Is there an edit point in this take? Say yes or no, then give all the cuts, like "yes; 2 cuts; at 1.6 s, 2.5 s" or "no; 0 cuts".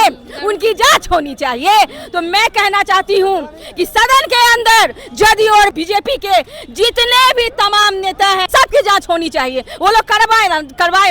yes; 2 cuts; at 5.7 s, 8.4 s